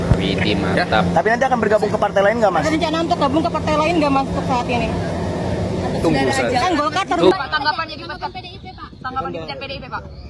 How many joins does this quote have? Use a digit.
1